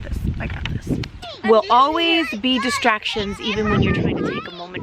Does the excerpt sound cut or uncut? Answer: cut